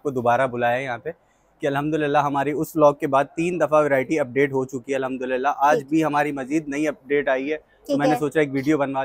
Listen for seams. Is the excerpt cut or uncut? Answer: uncut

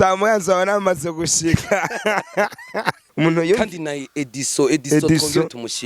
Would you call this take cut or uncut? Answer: cut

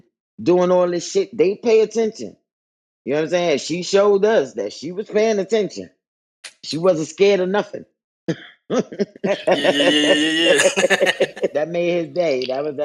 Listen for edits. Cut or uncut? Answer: cut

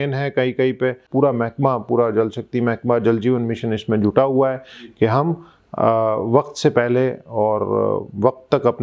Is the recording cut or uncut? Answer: cut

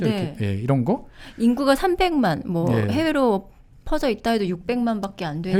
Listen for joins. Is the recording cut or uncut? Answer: uncut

